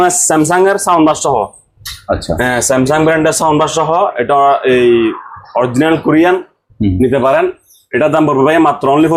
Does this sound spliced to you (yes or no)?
no